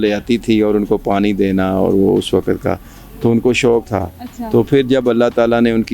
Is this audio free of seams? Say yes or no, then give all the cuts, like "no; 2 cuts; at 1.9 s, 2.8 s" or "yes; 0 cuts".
yes; 0 cuts